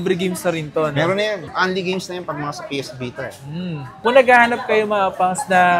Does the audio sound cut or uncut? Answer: cut